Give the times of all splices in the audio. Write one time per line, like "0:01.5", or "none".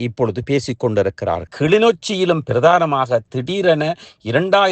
0:01.4

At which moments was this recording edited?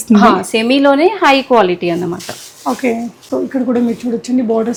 none

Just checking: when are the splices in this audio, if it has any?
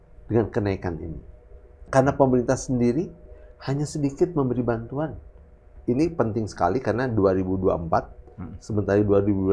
0:01.9
0:05.7

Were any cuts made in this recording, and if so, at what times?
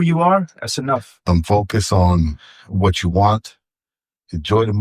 0:01.1

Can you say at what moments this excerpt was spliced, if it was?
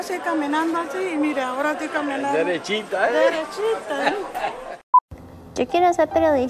0:04.7

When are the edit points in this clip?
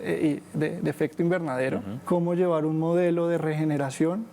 0:01.9

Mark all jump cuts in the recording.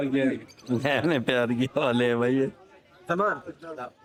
none

